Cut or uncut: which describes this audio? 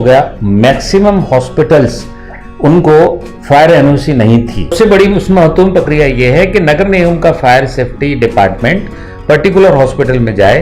cut